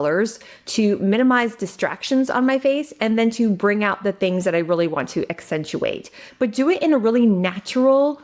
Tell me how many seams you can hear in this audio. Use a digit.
1